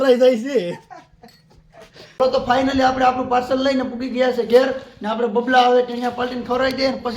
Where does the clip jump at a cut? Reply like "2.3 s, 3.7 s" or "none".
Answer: 2.3 s